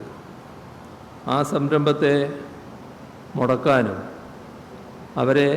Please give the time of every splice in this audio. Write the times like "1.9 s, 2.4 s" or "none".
none